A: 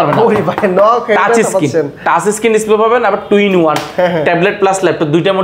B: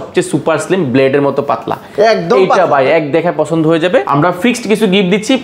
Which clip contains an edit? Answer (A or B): B